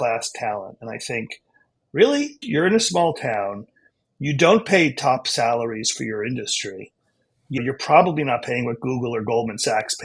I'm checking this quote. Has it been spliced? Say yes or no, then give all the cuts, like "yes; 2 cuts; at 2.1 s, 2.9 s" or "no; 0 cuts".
yes; 1 cut; at 2.4 s